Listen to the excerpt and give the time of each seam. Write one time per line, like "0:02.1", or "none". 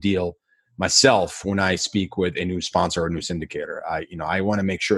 none